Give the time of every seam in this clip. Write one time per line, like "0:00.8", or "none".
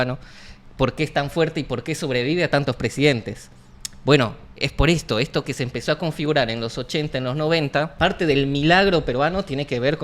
0:07.9

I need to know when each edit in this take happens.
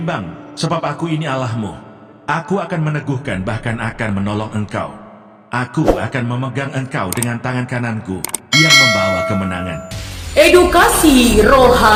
none

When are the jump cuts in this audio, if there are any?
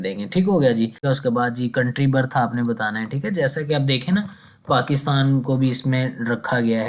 0:01.0

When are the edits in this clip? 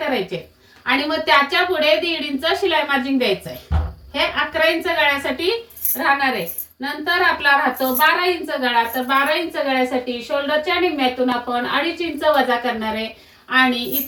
none

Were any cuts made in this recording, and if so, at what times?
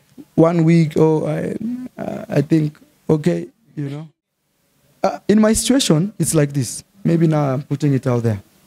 0:03.9

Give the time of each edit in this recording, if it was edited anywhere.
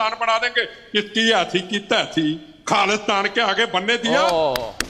none

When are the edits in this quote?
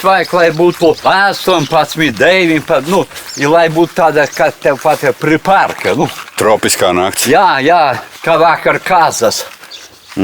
0:01.0
0:08.1

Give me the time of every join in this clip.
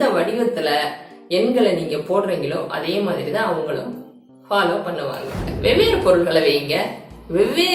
0:05.5

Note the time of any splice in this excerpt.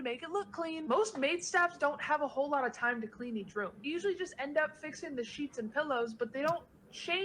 0:01.0

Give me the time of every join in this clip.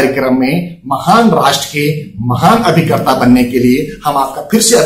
none

